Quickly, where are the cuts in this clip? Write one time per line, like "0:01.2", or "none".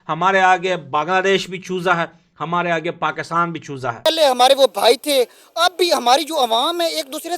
0:04.0